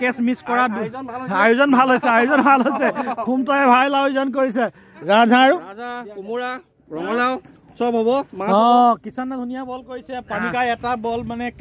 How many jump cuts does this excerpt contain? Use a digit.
1